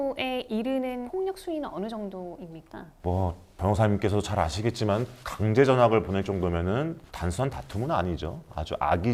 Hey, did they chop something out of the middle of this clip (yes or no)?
no